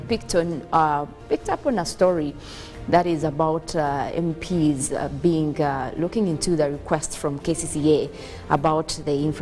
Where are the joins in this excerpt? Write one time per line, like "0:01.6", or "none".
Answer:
0:01.2
0:04.4